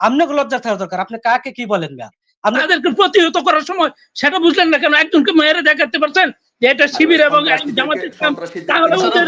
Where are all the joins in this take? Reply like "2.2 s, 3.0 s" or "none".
2.6 s